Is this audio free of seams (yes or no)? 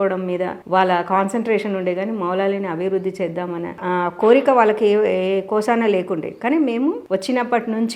yes